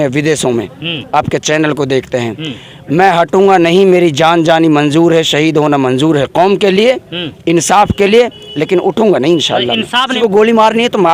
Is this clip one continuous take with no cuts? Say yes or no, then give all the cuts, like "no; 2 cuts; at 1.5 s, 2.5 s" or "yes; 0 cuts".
no; 1 cut; at 10.1 s